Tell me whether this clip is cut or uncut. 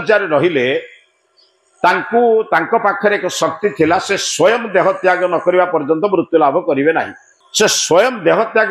uncut